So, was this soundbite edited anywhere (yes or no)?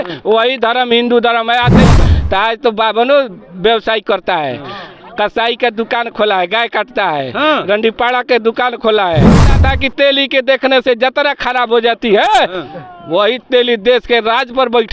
yes